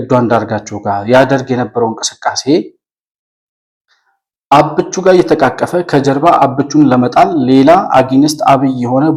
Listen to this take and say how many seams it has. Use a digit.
0